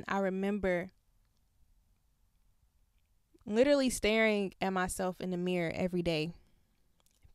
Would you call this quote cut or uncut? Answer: uncut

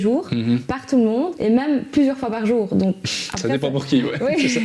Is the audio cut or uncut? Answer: cut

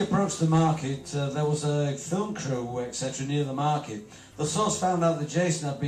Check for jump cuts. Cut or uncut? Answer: uncut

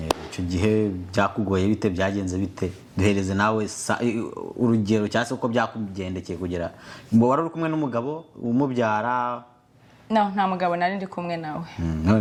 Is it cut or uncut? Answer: uncut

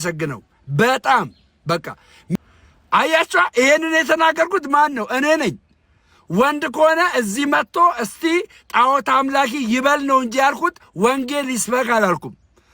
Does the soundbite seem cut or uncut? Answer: cut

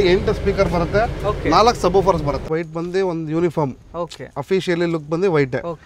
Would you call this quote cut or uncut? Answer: cut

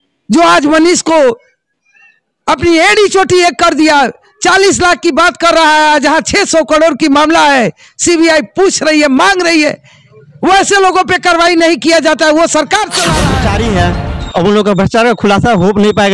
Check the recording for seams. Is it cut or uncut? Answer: cut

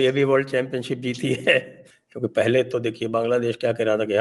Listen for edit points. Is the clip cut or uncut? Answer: uncut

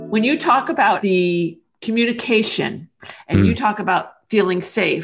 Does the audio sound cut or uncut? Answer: cut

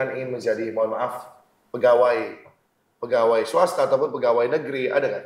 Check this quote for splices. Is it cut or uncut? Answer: cut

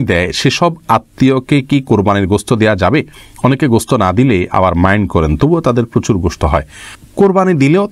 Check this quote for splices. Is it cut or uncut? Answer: uncut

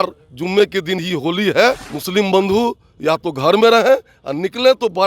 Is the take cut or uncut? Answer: cut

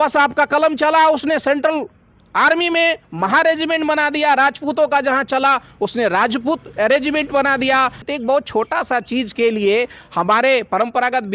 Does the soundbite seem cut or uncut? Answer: cut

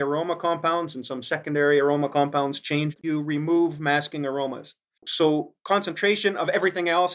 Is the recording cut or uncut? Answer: cut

